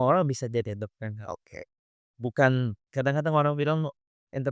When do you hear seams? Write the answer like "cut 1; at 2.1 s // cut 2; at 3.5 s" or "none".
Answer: none